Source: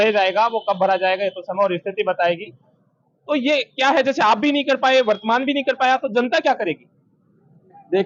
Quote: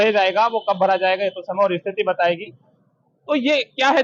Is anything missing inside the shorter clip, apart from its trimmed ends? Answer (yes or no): no